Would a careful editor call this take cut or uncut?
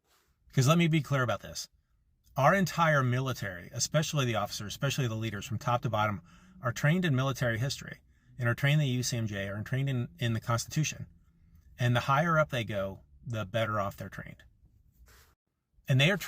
uncut